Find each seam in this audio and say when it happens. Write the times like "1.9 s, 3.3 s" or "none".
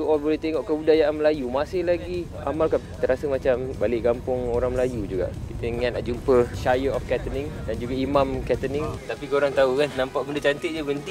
9.0 s